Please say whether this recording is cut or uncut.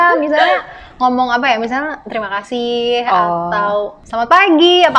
cut